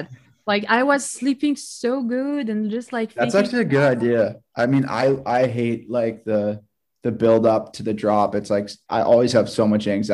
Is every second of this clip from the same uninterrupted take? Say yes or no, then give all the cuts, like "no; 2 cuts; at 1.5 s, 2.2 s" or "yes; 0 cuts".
no; 1 cut; at 8.8 s